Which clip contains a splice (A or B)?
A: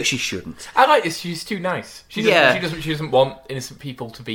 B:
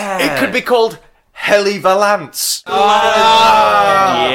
B